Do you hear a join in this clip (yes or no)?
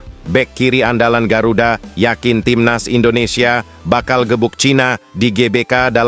no